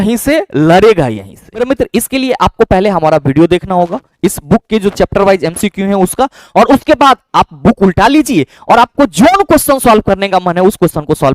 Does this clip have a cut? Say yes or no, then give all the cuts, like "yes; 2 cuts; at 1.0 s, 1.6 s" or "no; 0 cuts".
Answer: yes; 1 cut; at 1.6 s